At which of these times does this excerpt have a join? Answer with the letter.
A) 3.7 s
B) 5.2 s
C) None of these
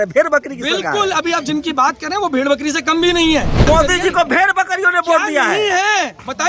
A